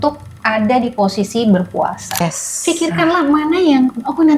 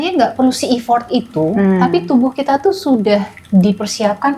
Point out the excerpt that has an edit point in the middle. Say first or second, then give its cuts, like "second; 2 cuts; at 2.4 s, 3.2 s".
first; 1 cut; at 2.2 s